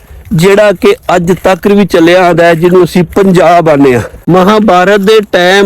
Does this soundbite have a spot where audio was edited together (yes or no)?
yes